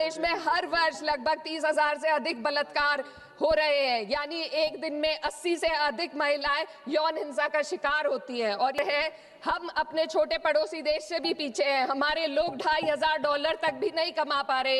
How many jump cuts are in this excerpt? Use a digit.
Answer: 1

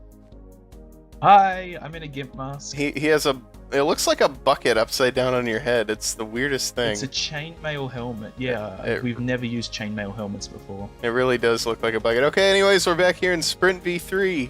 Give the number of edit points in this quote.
0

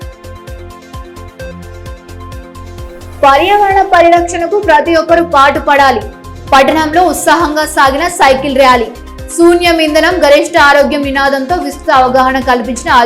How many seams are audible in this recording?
1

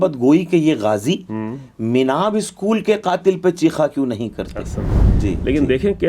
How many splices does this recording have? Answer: 1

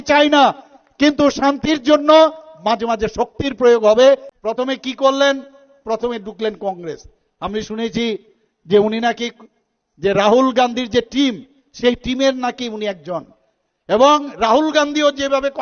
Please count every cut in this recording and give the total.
1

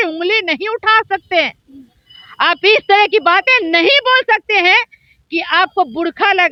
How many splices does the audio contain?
0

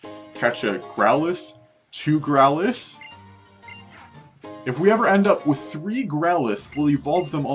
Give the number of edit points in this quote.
0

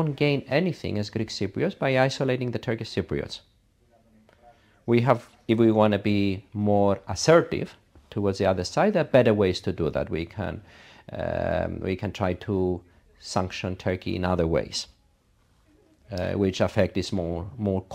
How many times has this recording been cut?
0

